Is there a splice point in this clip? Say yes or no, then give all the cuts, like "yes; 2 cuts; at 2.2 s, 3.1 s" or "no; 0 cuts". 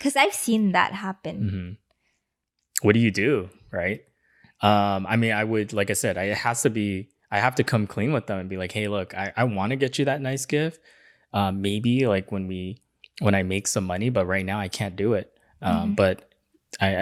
no; 0 cuts